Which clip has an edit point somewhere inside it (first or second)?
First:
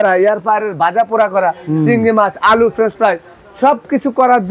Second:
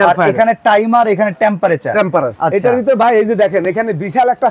second